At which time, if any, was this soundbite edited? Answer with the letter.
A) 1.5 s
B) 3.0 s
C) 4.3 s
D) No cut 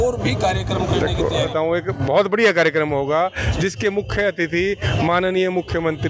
A